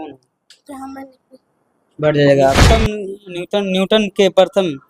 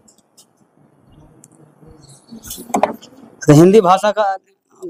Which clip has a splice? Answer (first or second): first